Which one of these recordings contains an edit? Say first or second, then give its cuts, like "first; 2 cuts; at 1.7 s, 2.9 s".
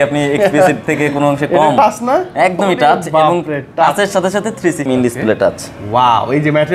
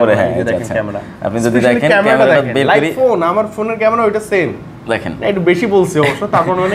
first; 1 cut; at 4.9 s